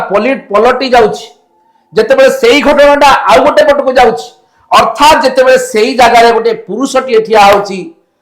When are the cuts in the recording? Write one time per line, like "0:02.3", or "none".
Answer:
none